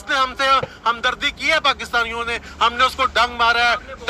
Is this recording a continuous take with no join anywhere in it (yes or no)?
yes